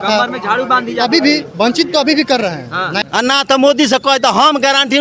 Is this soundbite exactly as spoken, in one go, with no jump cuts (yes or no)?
no